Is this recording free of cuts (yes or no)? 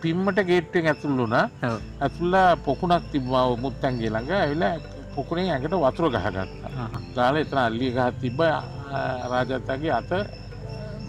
no